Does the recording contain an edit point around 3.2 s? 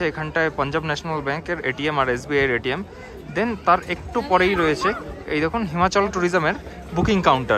no; 0 cuts

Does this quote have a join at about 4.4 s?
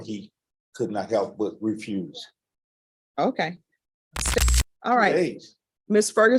yes; 1 cut; at 4.4 s

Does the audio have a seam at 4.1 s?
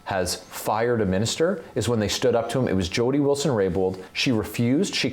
yes; 1 cut; at 4.1 s

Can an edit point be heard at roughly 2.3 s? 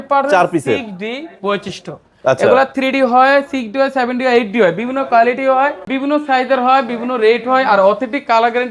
no; 1 cut; at 5.9 s

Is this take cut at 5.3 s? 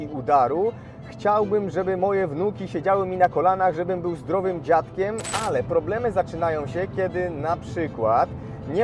yes; 1 cut; at 5.3 s

